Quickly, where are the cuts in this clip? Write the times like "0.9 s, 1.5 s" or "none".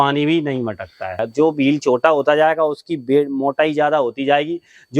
1.2 s